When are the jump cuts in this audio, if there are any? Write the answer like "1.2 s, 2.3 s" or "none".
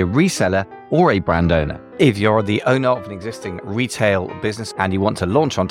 1.8 s, 4.6 s